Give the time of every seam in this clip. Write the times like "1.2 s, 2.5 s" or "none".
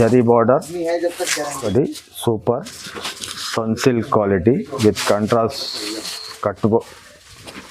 1.7 s